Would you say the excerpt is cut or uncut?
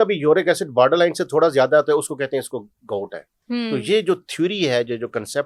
uncut